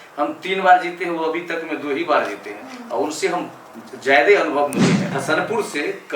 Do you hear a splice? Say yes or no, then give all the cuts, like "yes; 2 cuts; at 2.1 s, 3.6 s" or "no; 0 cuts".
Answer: yes; 1 cut; at 5.1 s